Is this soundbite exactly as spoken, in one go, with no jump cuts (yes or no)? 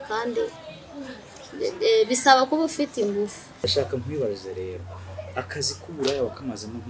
no